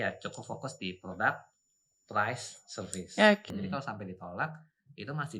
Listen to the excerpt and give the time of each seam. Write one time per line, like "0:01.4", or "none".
0:03.5

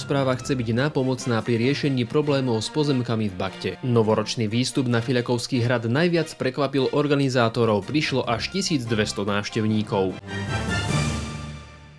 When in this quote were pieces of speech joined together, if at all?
0:10.2

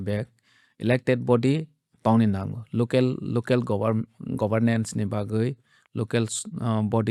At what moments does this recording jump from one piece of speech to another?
none

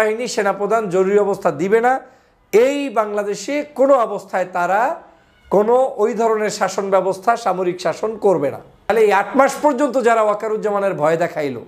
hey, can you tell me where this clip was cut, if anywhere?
0:08.9

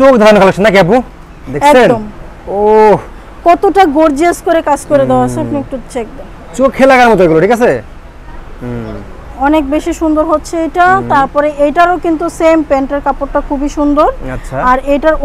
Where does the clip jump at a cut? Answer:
none

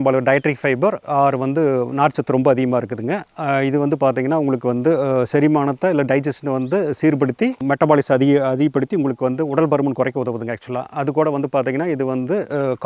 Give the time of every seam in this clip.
none

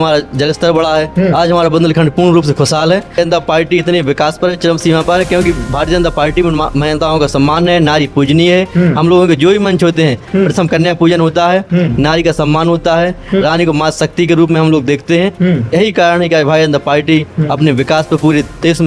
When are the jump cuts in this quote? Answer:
0:03.2

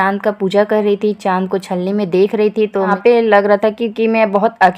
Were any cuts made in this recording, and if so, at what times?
0:02.9

